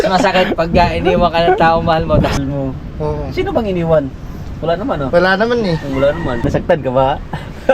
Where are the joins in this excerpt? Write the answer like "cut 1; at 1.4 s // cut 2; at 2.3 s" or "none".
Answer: cut 1; at 2.3 s // cut 2; at 6.4 s

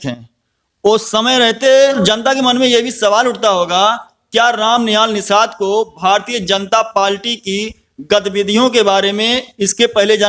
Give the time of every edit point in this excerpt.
cut 1; at 2.0 s

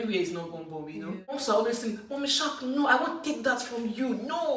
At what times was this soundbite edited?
cut 1; at 1.4 s

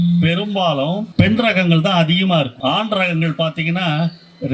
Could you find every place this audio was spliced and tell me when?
cut 1; at 1.1 s // cut 2; at 2.5 s

